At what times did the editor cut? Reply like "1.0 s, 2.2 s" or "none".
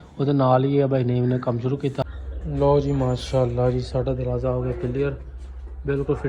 2.0 s